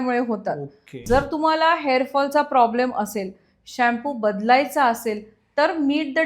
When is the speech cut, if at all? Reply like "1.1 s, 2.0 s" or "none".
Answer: 0.9 s